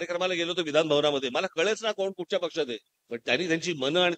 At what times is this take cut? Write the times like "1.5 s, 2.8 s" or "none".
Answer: 2.9 s